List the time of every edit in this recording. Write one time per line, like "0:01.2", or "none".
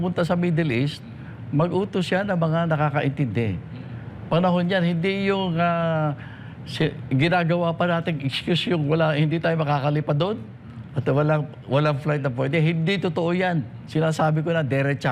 none